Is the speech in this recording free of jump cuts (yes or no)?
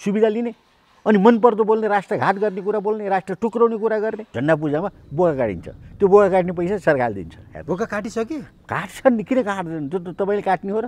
no